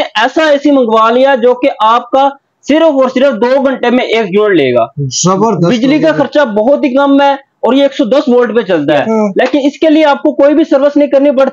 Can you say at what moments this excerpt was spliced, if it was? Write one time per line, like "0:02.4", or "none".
0:09.0